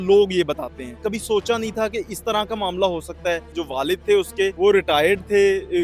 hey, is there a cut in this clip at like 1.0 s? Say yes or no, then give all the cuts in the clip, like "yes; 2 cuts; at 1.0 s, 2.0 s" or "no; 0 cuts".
yes; 3 cuts; at 1.0 s, 3.6 s, 4.5 s